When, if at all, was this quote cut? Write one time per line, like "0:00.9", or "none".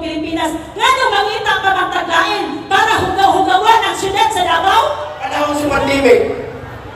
0:05.3